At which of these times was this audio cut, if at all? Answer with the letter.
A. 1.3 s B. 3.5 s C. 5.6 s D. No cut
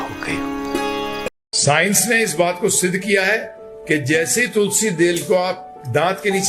A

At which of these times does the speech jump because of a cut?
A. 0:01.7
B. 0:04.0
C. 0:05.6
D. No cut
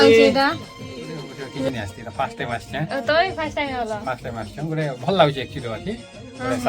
A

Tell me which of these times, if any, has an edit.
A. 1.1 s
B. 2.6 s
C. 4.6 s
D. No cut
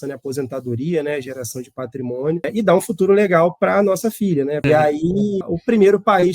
C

